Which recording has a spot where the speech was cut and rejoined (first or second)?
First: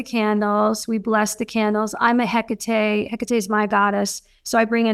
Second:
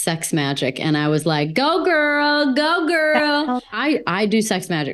second